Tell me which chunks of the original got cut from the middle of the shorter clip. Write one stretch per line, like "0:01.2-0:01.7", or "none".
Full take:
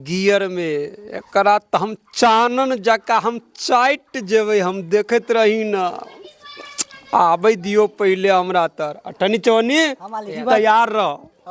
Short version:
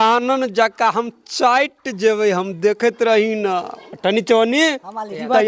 0:06.1-0:09.0

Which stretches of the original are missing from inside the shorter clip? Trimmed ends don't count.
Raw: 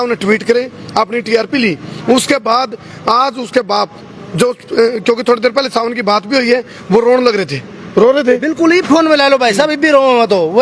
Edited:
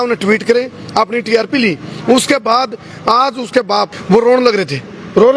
0:04.0-0:06.8

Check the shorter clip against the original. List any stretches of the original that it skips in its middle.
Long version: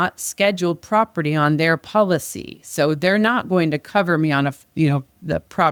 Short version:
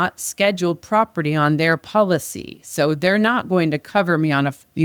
none

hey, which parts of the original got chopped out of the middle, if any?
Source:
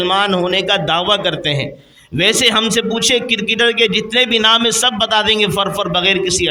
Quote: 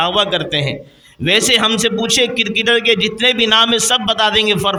none

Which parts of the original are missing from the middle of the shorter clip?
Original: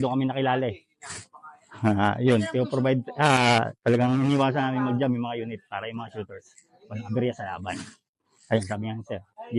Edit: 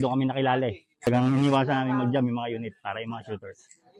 0:01.1-0:03.9

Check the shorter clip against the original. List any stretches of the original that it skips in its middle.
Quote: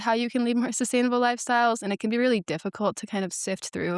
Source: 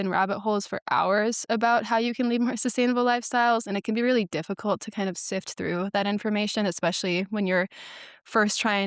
none

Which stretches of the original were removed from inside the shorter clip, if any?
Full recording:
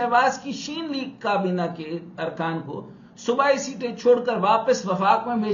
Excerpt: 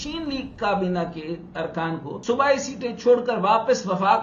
0:02.7-0:03.1

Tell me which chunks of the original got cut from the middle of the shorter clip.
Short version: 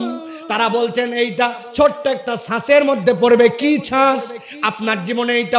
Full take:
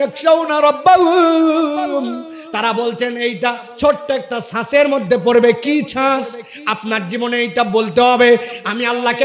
none

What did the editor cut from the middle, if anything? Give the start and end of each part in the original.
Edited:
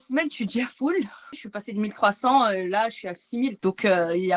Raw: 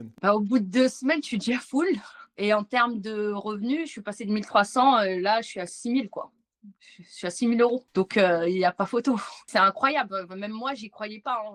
0:02.3-0:03.9
0:06.1-0:07.9

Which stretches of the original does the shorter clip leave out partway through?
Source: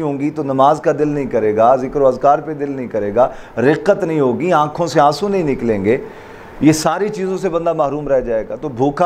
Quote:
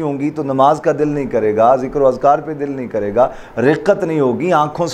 none

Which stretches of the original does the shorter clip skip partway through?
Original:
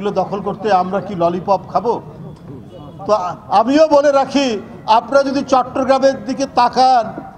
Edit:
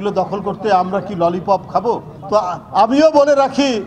0:02.1-0:02.9

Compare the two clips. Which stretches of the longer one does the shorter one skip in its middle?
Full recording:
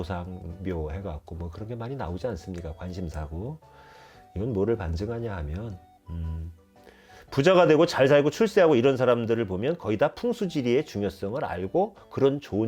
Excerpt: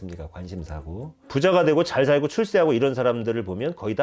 0:03.6-0:07.2

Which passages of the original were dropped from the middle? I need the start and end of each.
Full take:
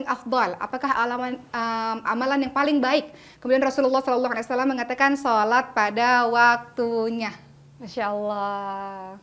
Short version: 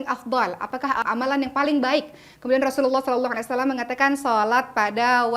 0:01.0-0:02.0

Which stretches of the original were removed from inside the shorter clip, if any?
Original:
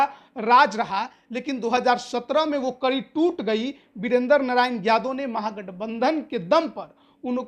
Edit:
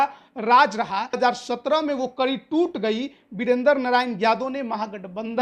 0:01.2-0:01.8

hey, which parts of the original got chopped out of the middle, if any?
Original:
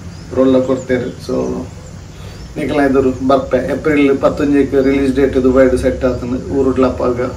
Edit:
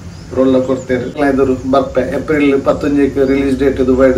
0:01.1-0:02.7

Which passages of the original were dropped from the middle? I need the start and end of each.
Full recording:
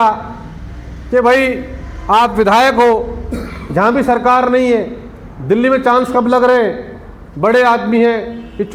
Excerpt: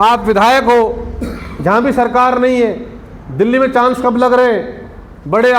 none

